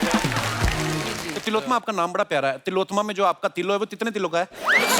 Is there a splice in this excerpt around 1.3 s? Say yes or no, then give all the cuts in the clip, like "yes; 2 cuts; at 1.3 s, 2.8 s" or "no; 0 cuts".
yes; 1 cut; at 1.3 s